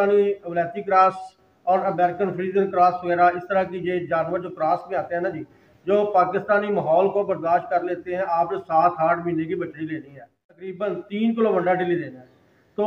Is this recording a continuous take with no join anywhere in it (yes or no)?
no